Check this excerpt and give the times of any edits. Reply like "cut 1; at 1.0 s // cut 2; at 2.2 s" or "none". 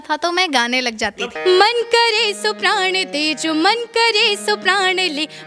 cut 1; at 1.3 s